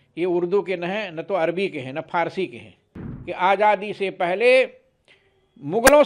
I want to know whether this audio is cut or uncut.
cut